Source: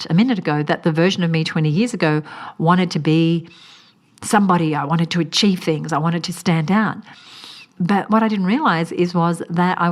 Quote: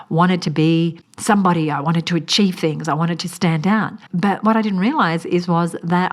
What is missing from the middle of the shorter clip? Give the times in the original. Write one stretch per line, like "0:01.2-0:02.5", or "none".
0:03.6-0:04.1
0:07.0-0:07.7